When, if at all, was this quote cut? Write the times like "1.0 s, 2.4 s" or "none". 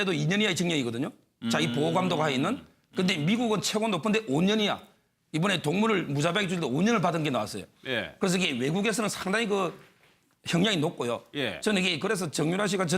1.7 s

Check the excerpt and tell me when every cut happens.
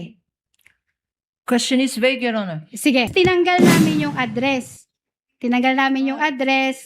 3.1 s

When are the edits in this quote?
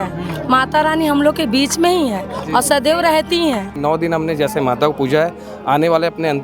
3.7 s

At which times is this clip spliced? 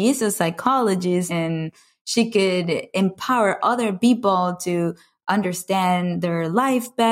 1.3 s

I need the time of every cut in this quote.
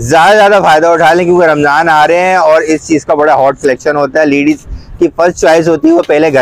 none

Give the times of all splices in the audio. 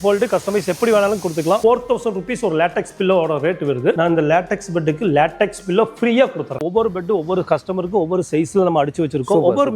1.6 s, 4.0 s, 6.6 s

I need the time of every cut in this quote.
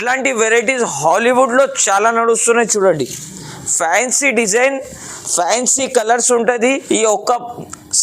6.8 s

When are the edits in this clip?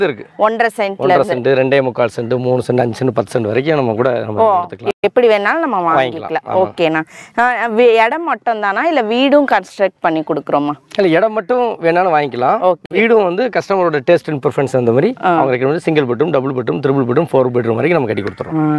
none

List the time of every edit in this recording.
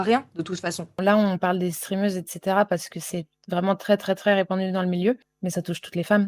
0.9 s, 5.3 s

